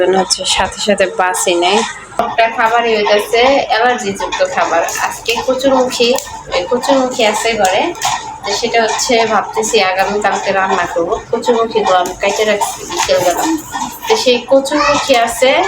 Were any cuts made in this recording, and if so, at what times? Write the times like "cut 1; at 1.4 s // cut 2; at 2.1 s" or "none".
cut 1; at 2.2 s